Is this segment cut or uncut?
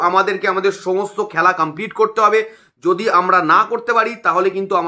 uncut